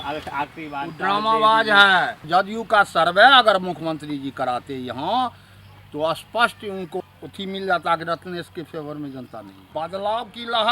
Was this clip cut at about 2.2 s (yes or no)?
yes